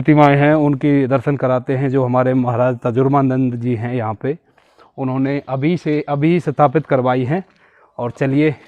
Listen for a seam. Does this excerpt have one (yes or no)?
no